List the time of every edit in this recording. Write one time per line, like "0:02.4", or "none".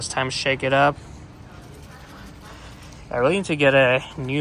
none